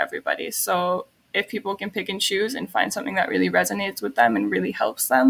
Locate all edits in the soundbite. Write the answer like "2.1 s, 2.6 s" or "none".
1.2 s